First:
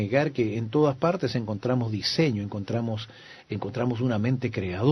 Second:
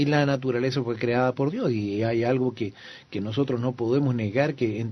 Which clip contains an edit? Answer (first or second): first